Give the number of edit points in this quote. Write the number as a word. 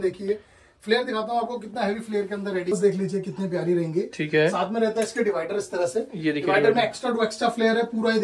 one